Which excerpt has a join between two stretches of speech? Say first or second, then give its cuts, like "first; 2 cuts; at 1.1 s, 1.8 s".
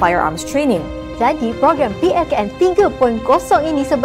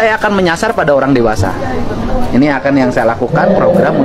first; 1 cut; at 1.0 s